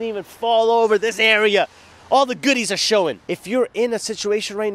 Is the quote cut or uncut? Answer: cut